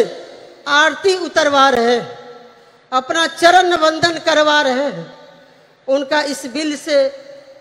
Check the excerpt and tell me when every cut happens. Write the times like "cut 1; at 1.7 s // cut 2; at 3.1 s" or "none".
none